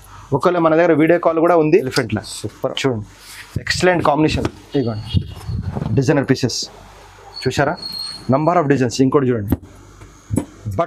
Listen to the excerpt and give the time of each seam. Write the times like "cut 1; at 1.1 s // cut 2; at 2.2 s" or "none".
cut 1; at 1.9 s